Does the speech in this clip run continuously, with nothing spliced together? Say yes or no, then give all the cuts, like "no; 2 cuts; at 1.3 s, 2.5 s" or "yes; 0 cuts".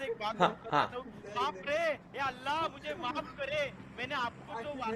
no; 1 cut; at 3.7 s